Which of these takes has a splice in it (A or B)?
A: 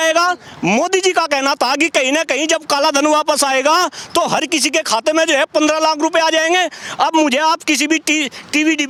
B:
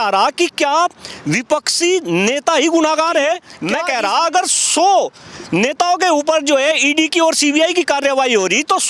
B